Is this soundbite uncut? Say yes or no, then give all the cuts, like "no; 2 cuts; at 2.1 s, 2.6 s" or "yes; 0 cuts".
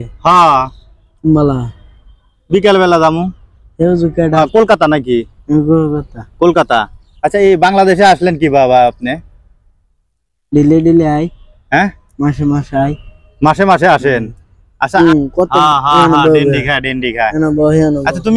no; 2 cuts; at 4.4 s, 15.0 s